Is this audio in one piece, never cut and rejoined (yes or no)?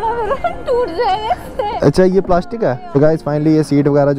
no